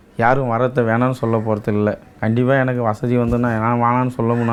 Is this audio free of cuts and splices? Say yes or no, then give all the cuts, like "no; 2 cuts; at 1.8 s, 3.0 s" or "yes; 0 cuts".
yes; 0 cuts